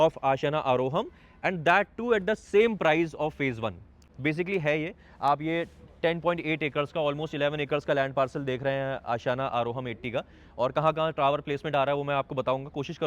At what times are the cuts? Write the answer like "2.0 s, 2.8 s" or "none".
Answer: 4.0 s